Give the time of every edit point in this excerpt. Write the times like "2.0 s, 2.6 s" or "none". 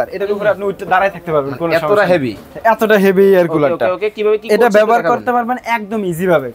none